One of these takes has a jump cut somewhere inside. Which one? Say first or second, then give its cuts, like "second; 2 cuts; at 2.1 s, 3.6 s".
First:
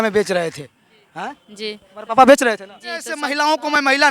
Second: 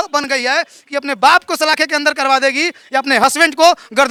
first; 1 cut; at 3.2 s